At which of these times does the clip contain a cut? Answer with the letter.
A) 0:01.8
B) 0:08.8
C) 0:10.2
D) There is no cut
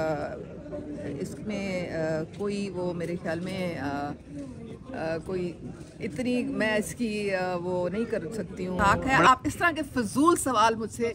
B